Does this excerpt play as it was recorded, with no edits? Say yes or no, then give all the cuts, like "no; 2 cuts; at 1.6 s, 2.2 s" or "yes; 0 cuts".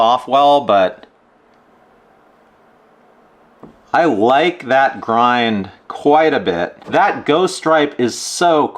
no; 1 cut; at 6.8 s